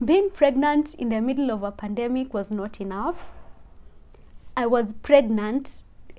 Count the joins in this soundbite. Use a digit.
0